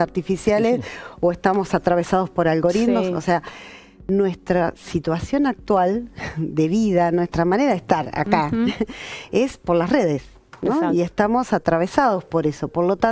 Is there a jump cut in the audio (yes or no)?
no